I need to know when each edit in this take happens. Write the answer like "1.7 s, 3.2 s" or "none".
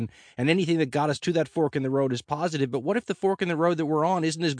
none